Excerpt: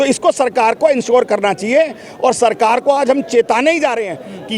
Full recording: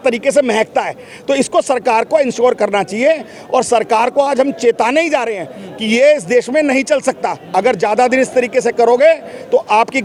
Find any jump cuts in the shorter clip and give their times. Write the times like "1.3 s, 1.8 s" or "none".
none